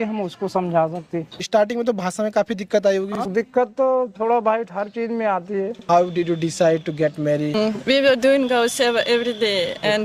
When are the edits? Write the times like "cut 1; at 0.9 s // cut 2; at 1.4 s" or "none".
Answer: cut 1; at 1.5 s // cut 2; at 3.1 s // cut 3; at 5.8 s // cut 4; at 7.7 s